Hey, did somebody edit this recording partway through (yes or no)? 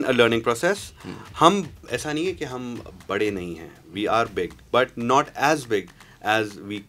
no